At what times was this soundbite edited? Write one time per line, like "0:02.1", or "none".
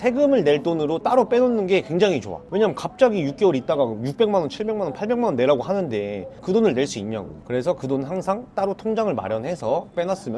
none